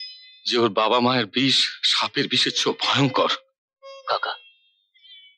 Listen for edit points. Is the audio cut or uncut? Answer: uncut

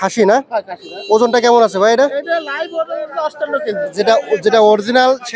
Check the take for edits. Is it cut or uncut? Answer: cut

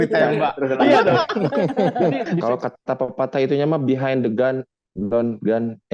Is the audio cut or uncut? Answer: cut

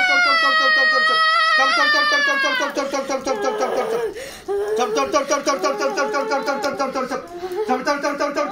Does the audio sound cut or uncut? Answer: uncut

